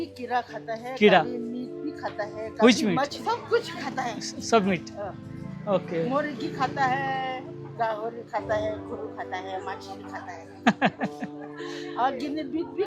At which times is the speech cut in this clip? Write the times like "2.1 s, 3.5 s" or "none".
3.2 s